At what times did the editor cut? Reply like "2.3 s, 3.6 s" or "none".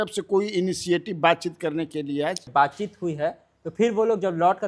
2.4 s